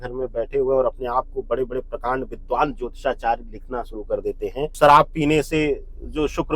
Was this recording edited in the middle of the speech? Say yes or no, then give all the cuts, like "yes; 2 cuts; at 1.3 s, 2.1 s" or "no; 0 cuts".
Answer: yes; 1 cut; at 4.7 s